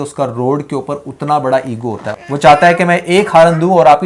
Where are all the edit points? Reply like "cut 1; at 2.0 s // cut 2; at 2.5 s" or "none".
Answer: cut 1; at 2.1 s